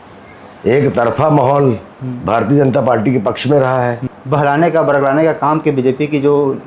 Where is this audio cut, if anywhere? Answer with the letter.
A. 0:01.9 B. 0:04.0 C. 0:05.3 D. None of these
B